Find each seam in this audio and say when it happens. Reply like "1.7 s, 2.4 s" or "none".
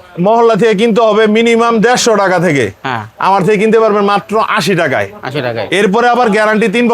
none